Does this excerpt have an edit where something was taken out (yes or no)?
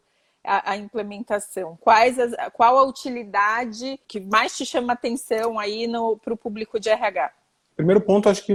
no